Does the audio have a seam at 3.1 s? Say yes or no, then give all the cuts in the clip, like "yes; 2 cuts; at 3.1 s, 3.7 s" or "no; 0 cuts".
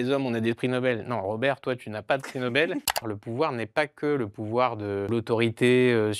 yes; 2 cuts; at 3.1 s, 5.1 s